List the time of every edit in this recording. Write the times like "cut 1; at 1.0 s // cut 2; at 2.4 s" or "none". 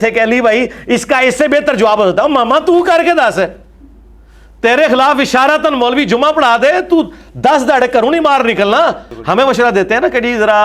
cut 1; at 9.1 s